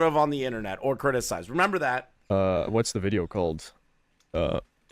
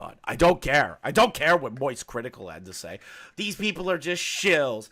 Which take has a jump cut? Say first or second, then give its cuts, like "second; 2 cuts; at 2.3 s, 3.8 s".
first; 1 cut; at 2.1 s